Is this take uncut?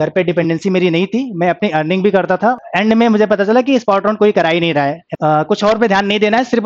no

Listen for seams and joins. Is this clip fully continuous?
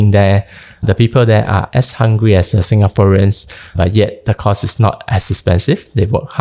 no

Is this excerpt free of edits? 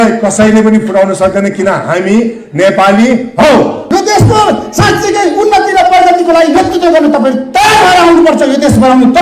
no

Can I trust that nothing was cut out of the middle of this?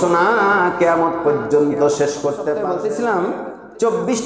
no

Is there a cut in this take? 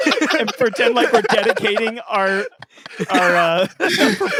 no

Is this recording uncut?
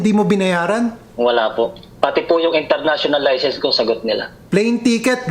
no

